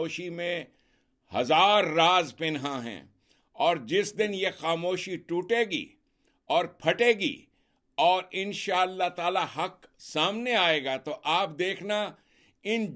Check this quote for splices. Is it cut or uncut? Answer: uncut